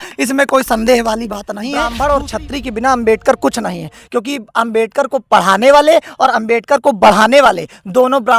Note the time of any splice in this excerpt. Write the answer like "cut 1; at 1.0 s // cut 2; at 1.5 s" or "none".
cut 1; at 1.9 s